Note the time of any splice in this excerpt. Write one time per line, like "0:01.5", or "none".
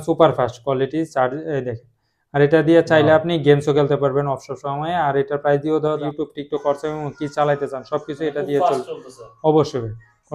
0:06.0